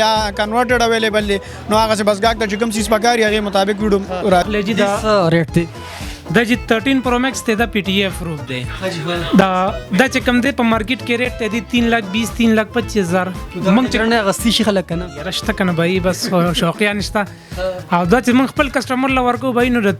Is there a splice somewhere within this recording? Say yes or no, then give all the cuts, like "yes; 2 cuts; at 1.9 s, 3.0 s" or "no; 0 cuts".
yes; 1 cut; at 4.5 s